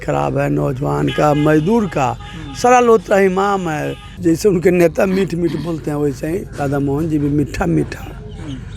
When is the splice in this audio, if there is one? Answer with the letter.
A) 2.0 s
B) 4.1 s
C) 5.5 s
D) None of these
B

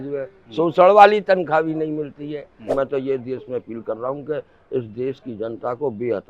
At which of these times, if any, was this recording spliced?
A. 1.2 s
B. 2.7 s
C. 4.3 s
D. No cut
B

